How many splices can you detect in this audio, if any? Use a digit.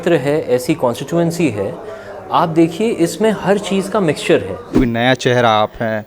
1